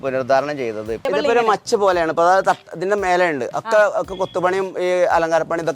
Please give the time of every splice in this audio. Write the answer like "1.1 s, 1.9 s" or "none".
1.1 s